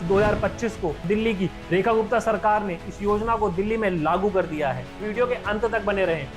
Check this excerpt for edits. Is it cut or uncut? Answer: cut